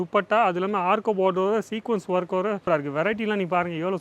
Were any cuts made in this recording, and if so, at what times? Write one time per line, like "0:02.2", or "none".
0:02.6